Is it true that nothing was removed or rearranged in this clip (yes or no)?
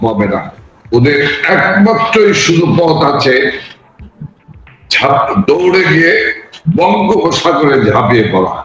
yes